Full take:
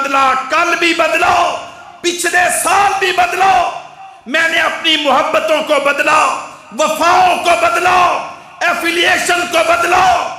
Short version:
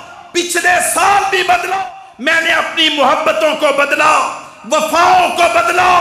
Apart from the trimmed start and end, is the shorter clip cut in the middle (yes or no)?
yes